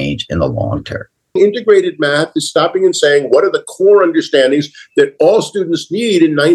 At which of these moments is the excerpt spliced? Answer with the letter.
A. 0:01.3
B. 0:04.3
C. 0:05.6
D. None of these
A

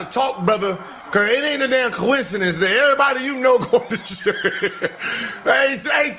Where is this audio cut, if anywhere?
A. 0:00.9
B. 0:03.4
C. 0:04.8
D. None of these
A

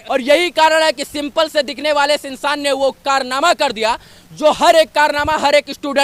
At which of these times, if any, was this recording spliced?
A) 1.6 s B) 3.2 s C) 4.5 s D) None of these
D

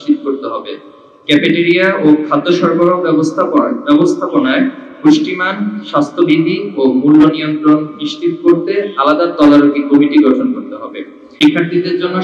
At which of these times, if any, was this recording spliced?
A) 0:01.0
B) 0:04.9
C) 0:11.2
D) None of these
C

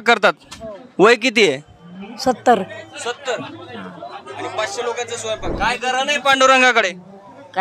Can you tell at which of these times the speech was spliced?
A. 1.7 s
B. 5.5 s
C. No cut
B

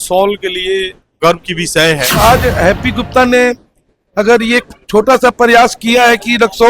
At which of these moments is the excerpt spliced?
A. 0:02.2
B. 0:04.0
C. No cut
A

